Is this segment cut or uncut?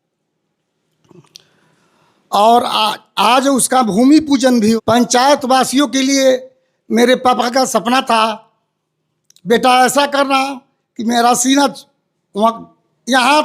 cut